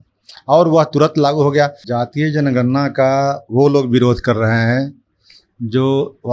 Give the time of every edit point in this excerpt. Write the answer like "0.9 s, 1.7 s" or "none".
1.8 s